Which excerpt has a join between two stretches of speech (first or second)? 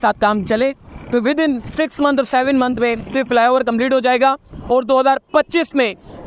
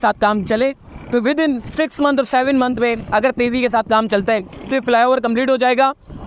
first